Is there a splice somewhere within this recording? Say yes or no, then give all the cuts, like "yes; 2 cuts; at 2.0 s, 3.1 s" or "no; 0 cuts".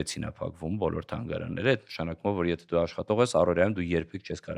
no; 0 cuts